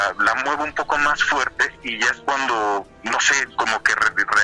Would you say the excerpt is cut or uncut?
uncut